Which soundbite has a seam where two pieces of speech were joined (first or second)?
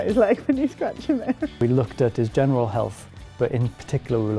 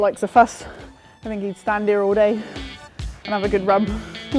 first